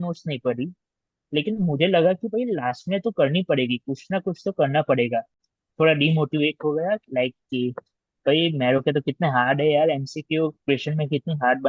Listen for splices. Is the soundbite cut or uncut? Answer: cut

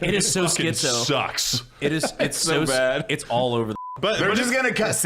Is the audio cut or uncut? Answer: uncut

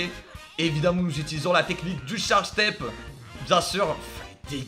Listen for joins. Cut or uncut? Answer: uncut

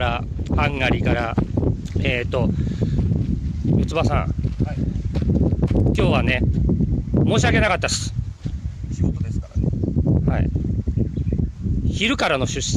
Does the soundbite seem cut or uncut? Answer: uncut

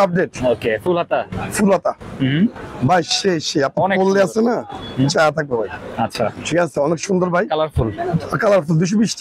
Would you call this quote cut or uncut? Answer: uncut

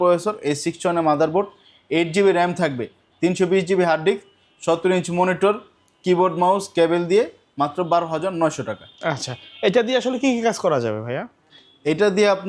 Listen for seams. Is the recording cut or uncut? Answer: uncut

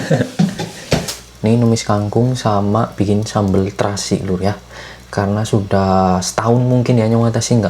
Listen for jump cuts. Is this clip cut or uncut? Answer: cut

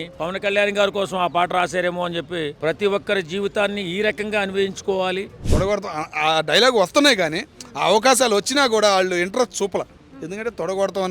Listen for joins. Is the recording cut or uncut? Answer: cut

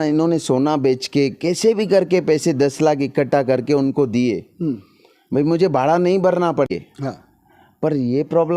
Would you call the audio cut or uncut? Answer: cut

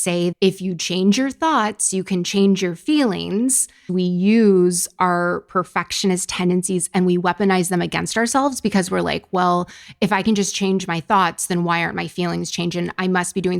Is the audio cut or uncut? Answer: cut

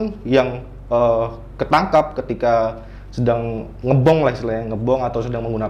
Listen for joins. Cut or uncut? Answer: uncut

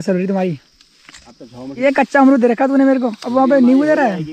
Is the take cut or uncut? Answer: cut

